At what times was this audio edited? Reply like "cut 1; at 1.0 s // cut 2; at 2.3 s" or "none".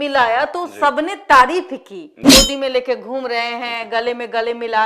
cut 1; at 2.2 s